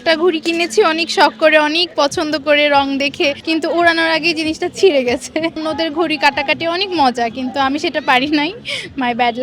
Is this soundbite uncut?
no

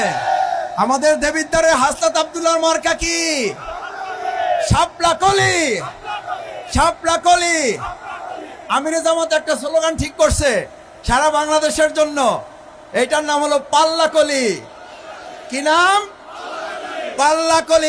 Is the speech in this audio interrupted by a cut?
no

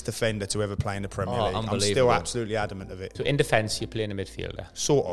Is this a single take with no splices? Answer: no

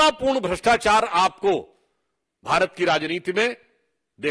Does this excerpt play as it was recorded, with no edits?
yes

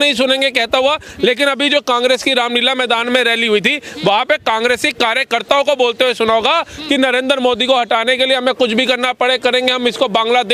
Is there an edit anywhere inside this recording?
no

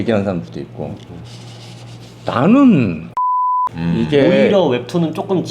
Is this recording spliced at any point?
yes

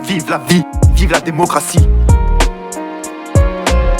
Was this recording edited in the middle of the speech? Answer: yes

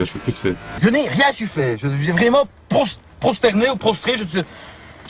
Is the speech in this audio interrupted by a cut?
no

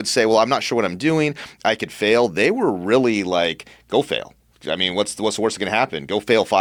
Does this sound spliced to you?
no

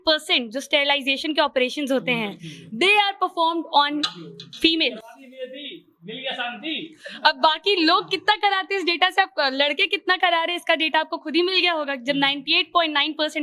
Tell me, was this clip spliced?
no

